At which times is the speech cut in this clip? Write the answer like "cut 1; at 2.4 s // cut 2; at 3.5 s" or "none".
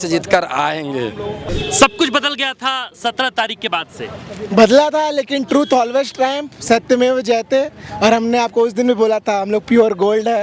cut 1; at 1.4 s